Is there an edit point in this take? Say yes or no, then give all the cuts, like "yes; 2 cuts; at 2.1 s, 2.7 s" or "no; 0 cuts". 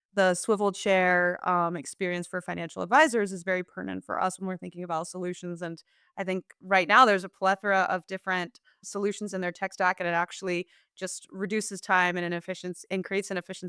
no; 0 cuts